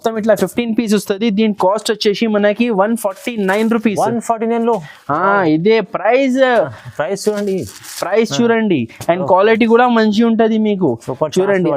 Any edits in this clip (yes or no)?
no